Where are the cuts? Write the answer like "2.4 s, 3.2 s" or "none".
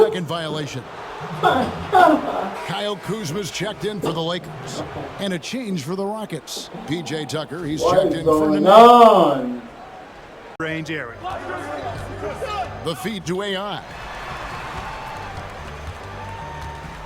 10.6 s